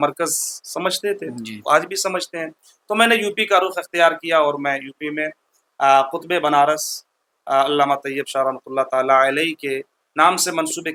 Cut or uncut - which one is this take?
uncut